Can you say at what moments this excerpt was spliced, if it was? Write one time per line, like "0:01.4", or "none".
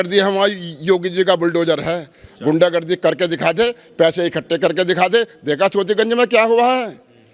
none